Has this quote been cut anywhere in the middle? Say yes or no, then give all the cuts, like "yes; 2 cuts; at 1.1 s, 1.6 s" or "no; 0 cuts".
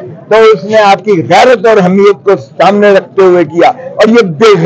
no; 0 cuts